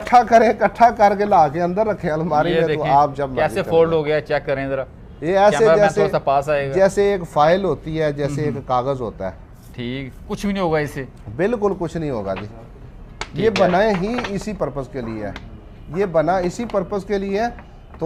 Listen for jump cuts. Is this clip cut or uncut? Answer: uncut